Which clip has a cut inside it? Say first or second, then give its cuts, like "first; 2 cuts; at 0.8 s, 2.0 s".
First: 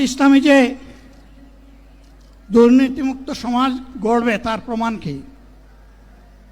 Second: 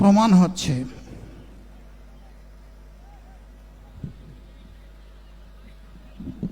second; 1 cut; at 5.6 s